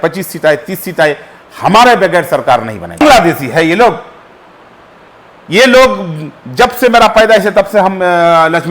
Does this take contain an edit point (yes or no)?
yes